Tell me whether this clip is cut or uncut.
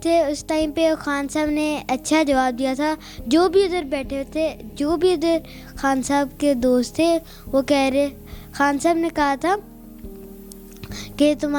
uncut